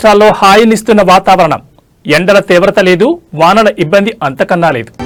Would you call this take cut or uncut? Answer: uncut